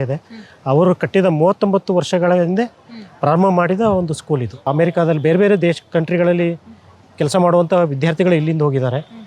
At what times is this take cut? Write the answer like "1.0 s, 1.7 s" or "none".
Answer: 4.7 s